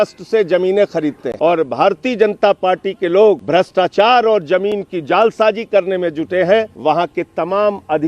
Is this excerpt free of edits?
no; 3 cuts; at 1.2 s, 3.4 s, 6.7 s

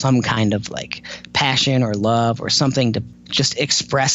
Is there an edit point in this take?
yes; 1 cut; at 3.2 s

